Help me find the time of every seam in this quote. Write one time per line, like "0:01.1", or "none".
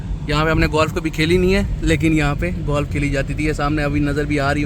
none